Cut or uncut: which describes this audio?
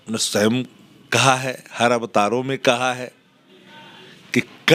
uncut